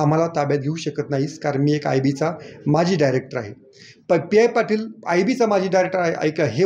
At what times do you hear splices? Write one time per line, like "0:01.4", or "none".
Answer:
none